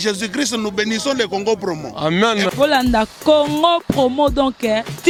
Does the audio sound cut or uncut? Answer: uncut